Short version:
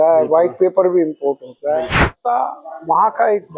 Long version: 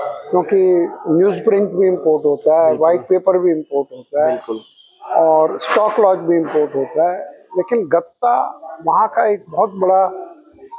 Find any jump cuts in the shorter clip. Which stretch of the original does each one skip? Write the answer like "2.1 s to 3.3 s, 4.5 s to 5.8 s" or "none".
4.6 s to 8.1 s